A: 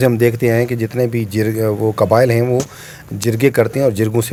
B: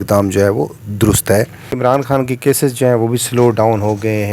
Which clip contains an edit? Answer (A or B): B